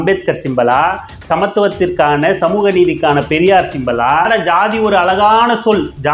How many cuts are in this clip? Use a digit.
1